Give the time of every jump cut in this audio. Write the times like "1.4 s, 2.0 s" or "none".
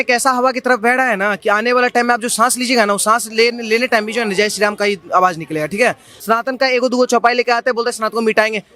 6.1 s